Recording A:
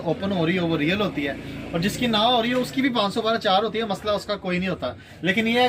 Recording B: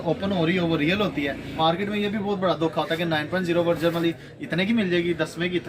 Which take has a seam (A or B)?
B